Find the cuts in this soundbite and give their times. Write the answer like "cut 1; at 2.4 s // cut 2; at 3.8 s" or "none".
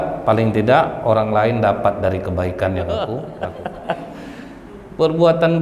cut 1; at 3.3 s